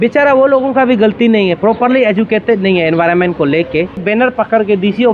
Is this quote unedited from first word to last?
no; 1 cut; at 4.0 s

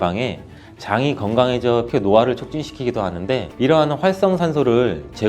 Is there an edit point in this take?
yes; 1 cut; at 1.9 s

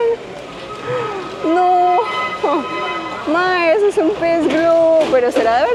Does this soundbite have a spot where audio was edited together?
no; 0 cuts

